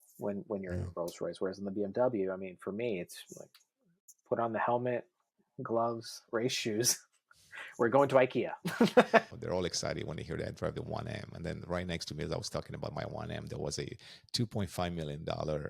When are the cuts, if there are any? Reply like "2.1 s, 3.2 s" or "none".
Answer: 9.2 s